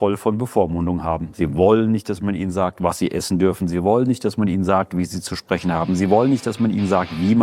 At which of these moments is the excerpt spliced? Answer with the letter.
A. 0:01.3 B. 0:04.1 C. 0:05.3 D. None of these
A